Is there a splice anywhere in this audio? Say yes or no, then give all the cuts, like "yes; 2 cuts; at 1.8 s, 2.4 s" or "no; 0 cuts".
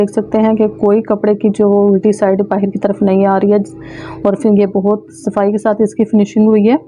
no; 0 cuts